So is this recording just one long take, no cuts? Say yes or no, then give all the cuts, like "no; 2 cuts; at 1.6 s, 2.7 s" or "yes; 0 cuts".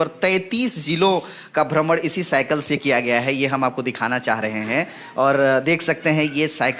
yes; 0 cuts